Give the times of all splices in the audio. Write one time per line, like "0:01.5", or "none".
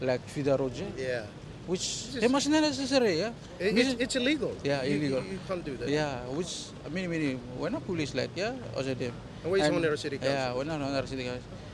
none

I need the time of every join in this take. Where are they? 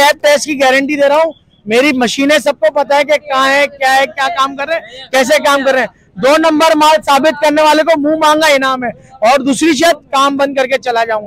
none

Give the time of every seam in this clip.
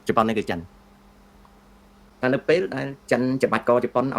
0:02.1

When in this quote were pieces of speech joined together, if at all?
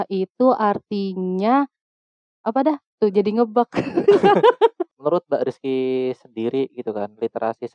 0:04.8

